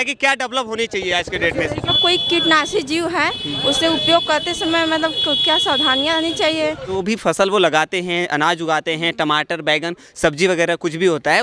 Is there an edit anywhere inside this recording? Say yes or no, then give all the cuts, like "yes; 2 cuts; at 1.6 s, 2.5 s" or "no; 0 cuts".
yes; 2 cuts; at 1.9 s, 7.0 s